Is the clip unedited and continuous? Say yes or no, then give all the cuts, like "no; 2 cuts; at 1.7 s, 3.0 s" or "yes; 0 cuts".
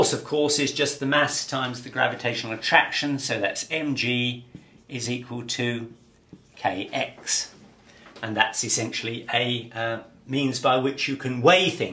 yes; 0 cuts